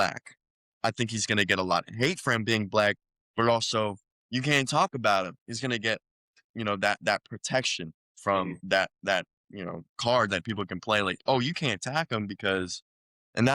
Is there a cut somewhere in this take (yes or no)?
yes